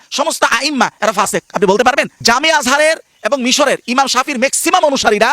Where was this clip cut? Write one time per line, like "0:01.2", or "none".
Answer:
0:02.1